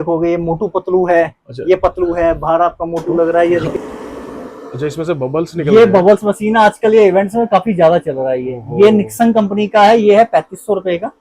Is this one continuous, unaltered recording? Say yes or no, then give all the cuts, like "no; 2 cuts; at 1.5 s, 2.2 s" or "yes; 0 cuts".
no; 1 cut; at 3.7 s